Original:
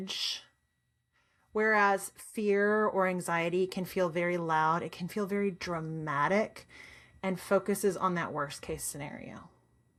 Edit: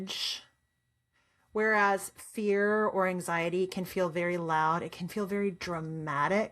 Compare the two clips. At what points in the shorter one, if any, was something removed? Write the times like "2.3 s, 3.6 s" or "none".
none